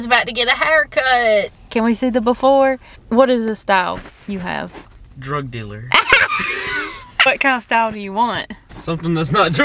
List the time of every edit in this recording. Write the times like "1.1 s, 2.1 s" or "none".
1.6 s, 2.9 s, 7.3 s